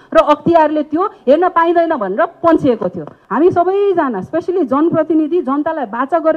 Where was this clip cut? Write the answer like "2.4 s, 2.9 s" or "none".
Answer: 3.2 s